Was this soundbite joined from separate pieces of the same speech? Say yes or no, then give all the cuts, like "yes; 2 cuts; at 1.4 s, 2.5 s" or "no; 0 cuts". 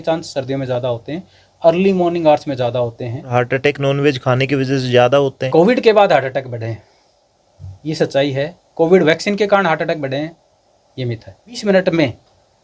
yes; 3 cuts; at 3.3 s, 5.4 s, 11.6 s